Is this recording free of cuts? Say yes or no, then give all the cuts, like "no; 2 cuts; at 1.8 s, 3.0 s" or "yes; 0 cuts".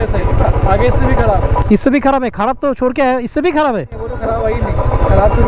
yes; 0 cuts